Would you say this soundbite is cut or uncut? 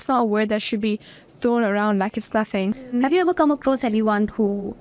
cut